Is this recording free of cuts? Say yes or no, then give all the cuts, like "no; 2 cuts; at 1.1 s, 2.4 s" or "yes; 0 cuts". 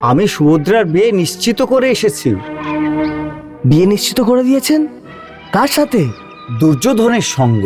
yes; 0 cuts